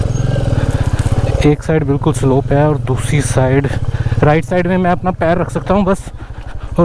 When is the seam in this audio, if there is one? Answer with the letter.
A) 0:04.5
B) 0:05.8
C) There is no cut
C